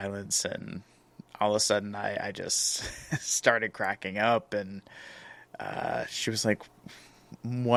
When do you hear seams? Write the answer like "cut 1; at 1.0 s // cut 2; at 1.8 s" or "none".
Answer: none